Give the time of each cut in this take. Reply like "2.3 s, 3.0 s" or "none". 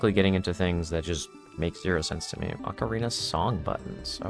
2.6 s